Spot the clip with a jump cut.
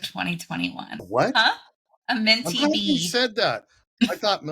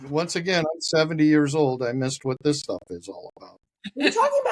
first; 1 cut; at 1.1 s

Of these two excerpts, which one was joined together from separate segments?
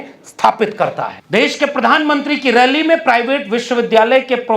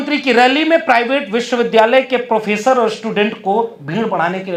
first; 1 cut; at 1.2 s

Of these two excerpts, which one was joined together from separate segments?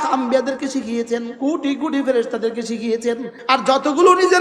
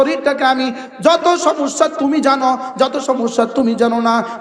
first; 2 cuts; at 1.3 s, 3.3 s

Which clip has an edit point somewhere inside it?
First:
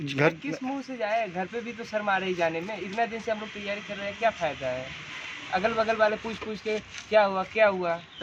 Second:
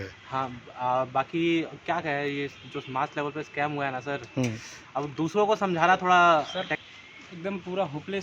second; 1 cut; at 6.6 s

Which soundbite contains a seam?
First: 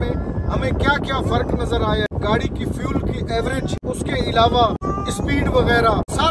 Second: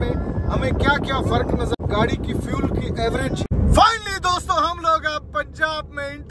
second; 2 cuts; at 1.8 s, 3.5 s

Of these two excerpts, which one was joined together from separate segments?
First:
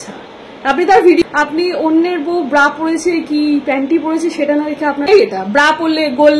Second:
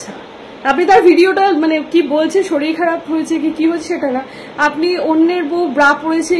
first; 2 cuts; at 1.2 s, 5.1 s

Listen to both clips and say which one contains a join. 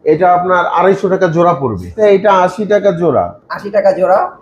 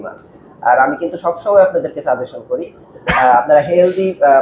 first; 1 cut; at 1.9 s

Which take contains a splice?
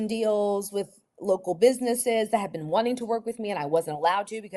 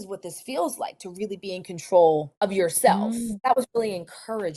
second; 2 cuts; at 2.5 s, 3.4 s

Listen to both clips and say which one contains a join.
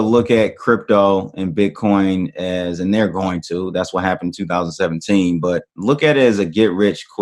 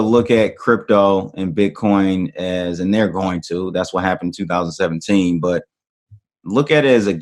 first; 1 cut; at 5.7 s

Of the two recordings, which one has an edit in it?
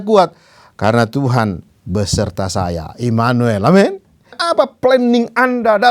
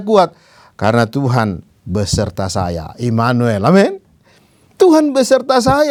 first; 1 cut; at 4.4 s

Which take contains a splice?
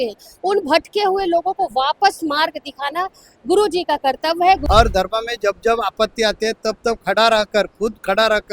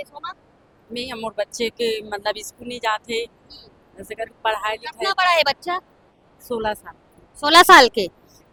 first; 1 cut; at 4.6 s

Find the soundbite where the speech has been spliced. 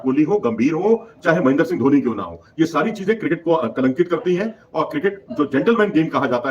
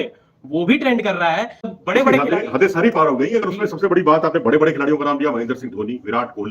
second; 1 cut; at 1.7 s

